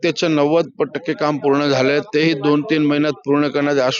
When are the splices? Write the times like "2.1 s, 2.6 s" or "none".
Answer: none